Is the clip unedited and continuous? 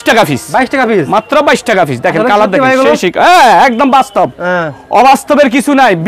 yes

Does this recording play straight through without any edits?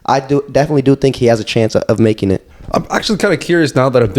yes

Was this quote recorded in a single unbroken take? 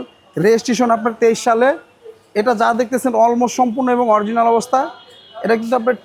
yes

